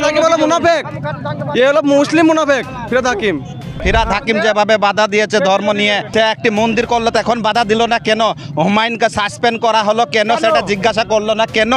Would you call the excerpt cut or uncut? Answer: cut